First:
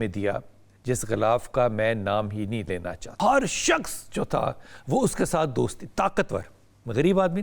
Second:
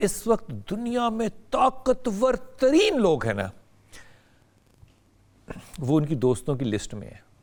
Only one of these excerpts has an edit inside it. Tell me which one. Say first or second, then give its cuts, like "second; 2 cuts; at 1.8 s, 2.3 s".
first; 1 cut; at 3.0 s